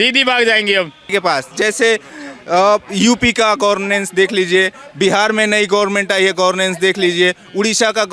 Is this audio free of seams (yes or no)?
no